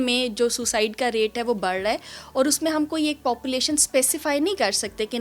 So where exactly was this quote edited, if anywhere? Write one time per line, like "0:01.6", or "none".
none